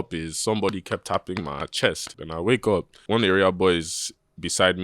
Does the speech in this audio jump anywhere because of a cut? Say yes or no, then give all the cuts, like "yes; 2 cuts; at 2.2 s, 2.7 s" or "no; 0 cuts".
yes; 2 cuts; at 2.2 s, 3.0 s